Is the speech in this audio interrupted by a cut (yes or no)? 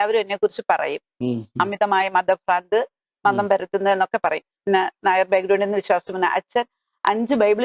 yes